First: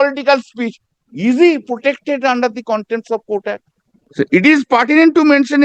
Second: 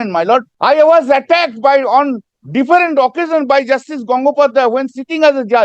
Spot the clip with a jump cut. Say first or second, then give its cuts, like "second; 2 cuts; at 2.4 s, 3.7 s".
first; 1 cut; at 4.0 s